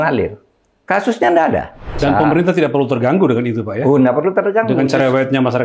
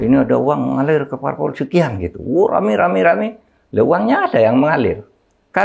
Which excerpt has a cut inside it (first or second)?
first